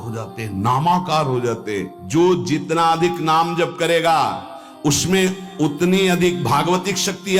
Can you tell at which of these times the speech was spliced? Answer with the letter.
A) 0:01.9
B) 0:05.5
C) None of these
A